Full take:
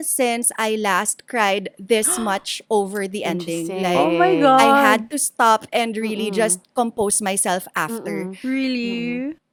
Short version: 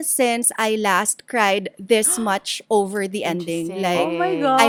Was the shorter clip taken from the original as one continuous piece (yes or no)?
yes